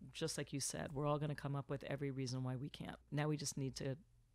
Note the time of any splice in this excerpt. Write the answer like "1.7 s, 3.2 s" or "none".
3.1 s